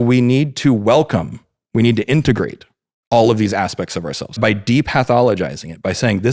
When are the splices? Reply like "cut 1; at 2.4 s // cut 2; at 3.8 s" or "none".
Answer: cut 1; at 4.3 s